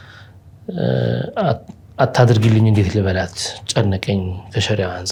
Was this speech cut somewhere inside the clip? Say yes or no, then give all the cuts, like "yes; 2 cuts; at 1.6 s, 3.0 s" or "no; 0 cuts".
no; 0 cuts